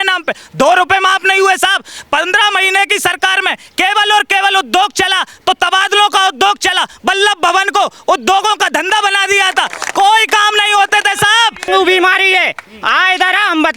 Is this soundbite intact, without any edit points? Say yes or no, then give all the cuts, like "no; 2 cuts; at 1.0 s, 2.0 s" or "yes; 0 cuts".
no; 1 cut; at 11.6 s